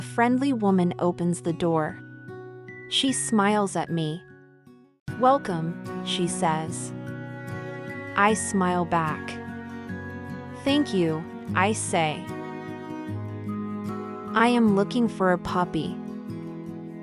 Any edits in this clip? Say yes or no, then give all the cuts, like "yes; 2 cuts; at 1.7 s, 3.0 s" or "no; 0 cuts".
yes; 1 cut; at 16.0 s